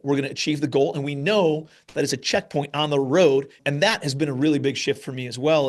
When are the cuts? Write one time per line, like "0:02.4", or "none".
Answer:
0:03.6